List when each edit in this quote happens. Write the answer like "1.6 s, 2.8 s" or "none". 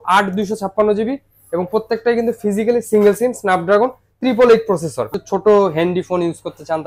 5.2 s